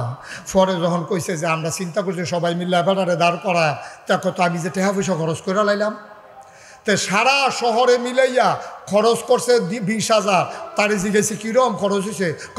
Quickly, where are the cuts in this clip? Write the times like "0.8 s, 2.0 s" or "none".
none